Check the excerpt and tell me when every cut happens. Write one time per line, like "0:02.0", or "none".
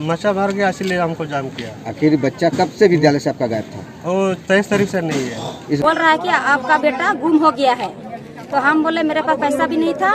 0:05.8